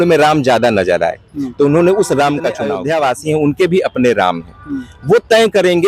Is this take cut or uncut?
cut